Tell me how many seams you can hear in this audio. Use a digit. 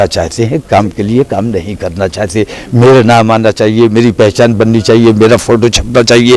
0